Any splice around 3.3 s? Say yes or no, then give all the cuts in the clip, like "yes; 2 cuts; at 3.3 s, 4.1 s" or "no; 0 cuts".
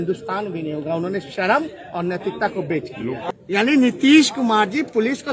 yes; 1 cut; at 3.3 s